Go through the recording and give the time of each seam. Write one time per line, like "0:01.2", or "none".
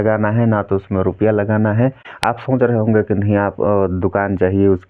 0:02.1